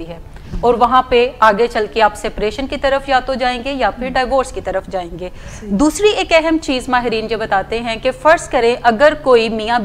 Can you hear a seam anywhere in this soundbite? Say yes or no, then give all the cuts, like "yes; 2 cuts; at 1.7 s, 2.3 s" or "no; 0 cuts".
no; 0 cuts